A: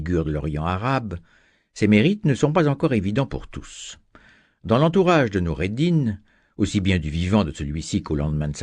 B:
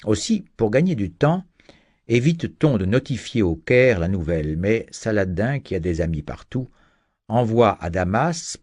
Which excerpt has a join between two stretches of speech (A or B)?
A